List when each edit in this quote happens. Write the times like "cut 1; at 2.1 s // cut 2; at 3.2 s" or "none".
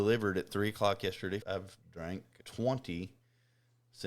cut 1; at 1.4 s

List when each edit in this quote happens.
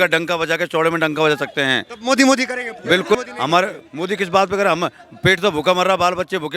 cut 1; at 3.2 s

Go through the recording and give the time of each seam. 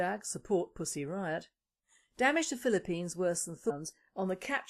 none

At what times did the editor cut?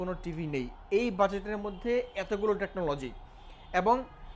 none

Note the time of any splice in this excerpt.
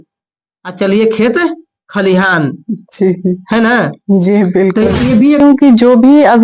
cut 1; at 5.4 s

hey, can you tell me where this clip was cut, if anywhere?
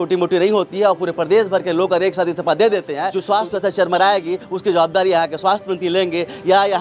cut 1; at 3.2 s

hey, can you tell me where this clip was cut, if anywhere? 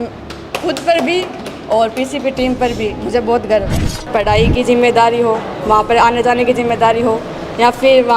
cut 1; at 4.1 s

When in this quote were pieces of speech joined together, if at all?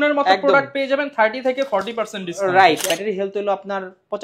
cut 1; at 2.8 s

